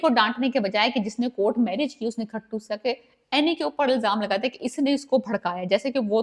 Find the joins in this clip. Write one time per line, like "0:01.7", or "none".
none